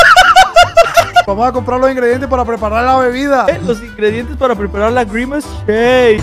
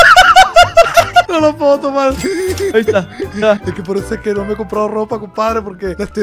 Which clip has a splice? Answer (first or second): first